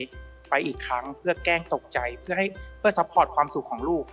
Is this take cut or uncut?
uncut